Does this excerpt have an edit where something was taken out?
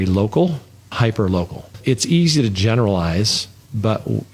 yes; 1 cut; at 0.9 s

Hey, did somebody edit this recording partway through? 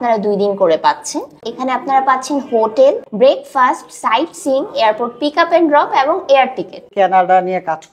yes; 3 cuts; at 1.3 s, 3.1 s, 6.9 s

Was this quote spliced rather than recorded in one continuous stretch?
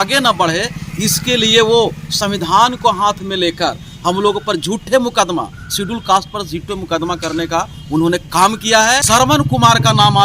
yes; 1 cut; at 9.0 s

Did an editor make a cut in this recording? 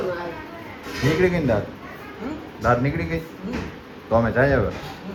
no; 0 cuts

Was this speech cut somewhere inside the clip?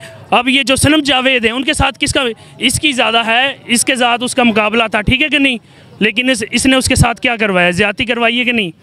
no; 0 cuts

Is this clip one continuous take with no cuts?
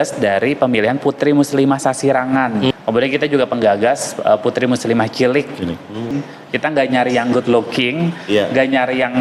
no; 2 cuts; at 2.7 s, 6.1 s

